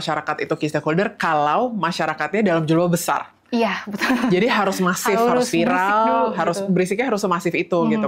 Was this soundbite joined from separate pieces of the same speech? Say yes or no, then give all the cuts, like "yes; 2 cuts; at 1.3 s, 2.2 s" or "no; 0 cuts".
no; 0 cuts